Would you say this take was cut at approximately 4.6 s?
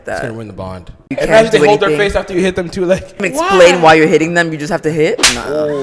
no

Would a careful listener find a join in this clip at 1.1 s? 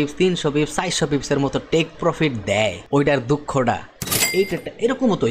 no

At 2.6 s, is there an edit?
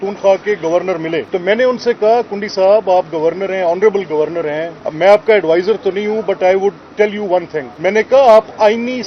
no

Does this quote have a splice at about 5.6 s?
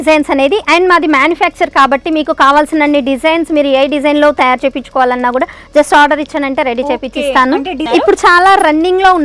no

